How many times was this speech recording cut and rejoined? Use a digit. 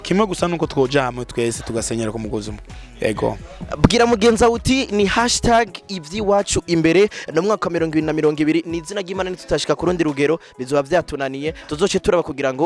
0